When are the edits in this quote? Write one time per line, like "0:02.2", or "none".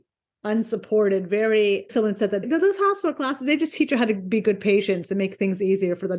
0:01.9